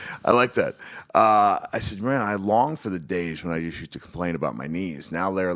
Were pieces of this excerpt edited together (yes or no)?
yes